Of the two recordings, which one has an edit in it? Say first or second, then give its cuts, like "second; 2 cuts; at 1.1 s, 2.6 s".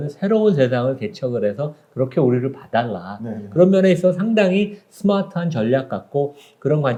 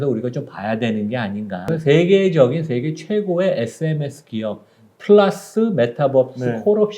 second; 1 cut; at 1.6 s